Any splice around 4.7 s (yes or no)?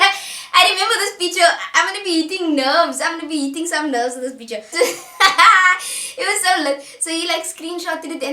yes